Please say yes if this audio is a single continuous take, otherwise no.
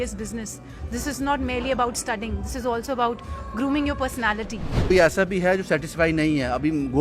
no